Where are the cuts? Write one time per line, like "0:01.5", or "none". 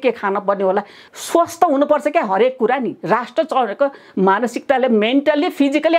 0:01.0